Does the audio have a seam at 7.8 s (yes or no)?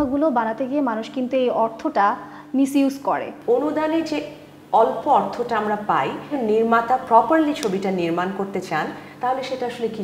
no